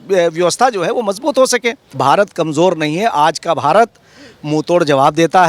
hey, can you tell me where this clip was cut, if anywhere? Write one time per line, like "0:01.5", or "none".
0:01.9